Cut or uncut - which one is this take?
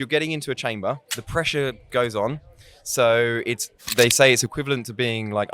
cut